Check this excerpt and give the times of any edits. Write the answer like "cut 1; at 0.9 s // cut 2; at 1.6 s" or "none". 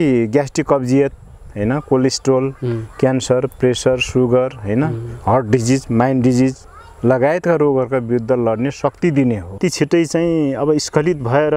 cut 1; at 9.6 s